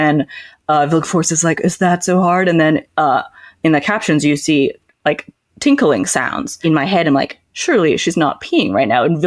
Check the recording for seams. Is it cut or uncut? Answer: cut